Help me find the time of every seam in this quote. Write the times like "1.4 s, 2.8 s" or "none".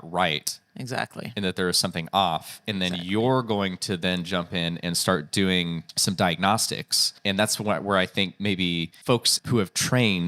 5.9 s, 7.1 s, 9.3 s